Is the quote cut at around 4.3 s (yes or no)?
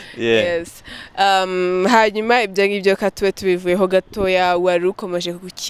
no